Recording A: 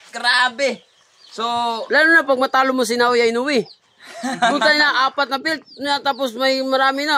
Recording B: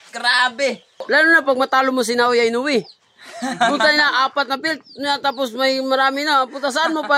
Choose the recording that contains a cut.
B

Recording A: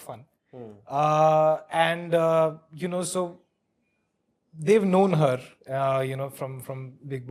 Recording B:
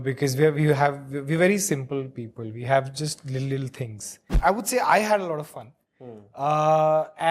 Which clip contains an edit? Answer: B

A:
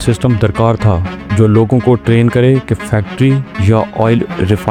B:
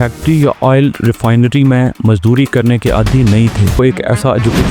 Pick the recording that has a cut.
B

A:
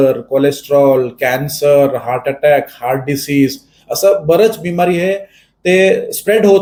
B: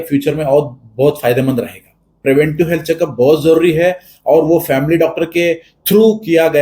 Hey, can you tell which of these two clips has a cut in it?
B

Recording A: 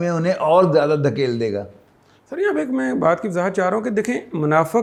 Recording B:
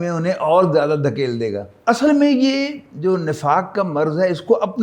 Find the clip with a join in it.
B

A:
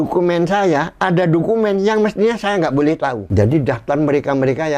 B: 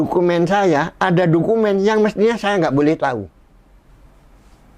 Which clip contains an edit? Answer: A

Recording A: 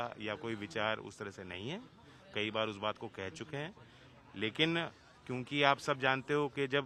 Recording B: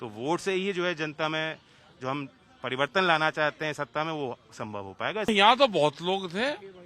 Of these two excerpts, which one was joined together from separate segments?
B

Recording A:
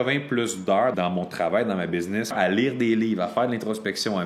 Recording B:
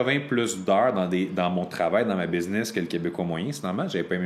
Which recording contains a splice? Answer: A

